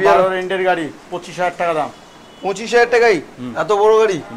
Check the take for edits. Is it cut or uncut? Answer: uncut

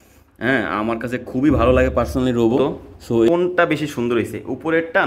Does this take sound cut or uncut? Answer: cut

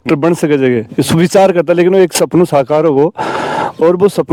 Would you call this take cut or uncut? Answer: uncut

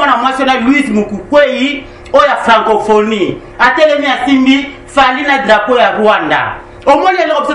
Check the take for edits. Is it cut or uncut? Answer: uncut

